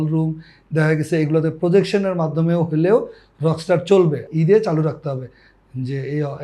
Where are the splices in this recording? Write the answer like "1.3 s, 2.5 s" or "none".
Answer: 4.3 s